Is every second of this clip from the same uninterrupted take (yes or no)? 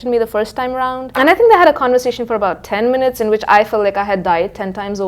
no